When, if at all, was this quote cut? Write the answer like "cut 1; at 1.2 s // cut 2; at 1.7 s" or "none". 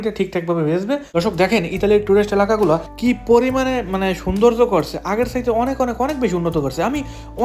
cut 1; at 1.1 s